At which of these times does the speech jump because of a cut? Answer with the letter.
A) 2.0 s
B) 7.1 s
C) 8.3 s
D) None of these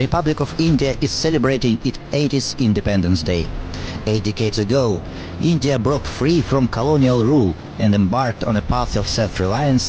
D